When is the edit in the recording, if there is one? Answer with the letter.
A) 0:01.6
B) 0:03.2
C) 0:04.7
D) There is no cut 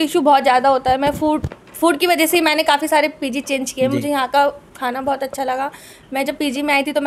D